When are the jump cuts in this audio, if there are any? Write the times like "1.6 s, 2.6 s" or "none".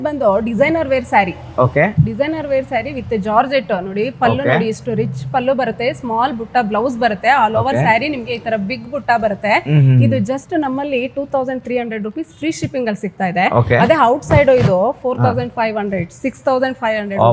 none